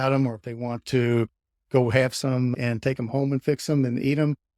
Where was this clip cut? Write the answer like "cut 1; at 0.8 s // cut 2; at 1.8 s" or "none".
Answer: cut 1; at 2.5 s